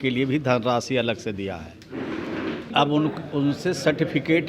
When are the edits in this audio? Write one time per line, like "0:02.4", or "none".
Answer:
0:02.7